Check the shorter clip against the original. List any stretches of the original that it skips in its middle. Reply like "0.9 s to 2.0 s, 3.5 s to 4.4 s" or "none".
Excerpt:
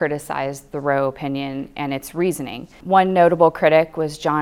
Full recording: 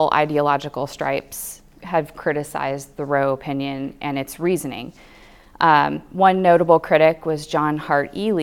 5.0 s to 6.0 s